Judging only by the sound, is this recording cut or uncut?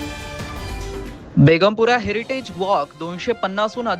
cut